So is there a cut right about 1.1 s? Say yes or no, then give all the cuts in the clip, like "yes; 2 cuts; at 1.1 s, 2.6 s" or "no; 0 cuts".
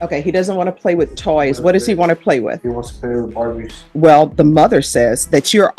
no; 1 cut; at 3.8 s